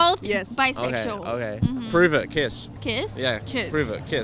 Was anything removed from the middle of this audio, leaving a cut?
yes; 1 cut; at 2.7 s

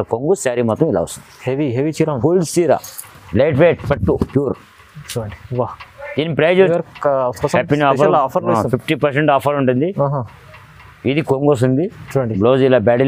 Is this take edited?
yes; 1 cut; at 6.7 s

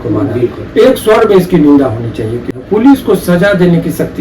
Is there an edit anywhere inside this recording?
yes; 1 cut; at 2.6 s

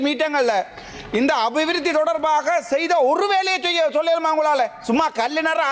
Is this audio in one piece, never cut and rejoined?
yes; 0 cuts

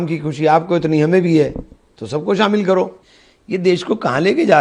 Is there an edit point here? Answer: yes; 1 cut; at 3.0 s

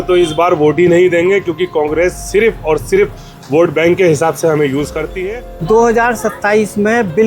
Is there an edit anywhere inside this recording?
yes; 1 cut; at 5.6 s

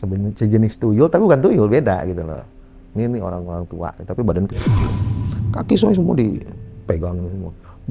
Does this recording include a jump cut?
no; 0 cuts

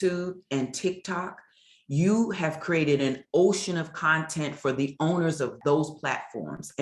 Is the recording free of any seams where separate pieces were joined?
no; 1 cut; at 5.6 s

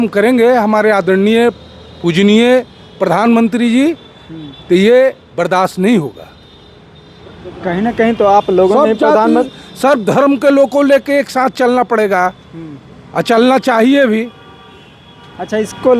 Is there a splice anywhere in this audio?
no; 0 cuts

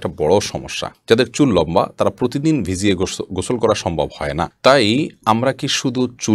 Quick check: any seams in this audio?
no; 0 cuts

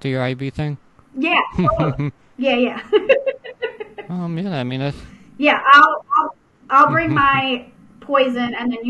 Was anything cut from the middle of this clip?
no; 0 cuts

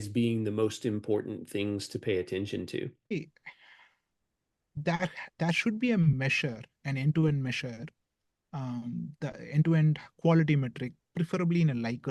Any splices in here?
yes; 1 cut; at 3.1 s

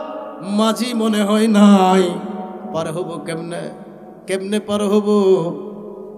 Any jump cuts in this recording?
no; 0 cuts

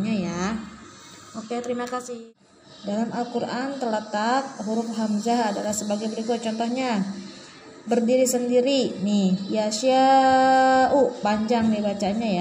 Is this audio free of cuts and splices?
no; 1 cut; at 2.2 s

